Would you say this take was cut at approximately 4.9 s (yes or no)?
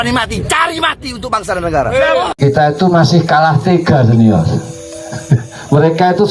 no